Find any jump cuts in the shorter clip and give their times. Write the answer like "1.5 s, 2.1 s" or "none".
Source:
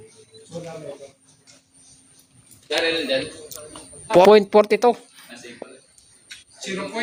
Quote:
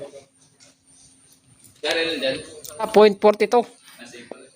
2.9 s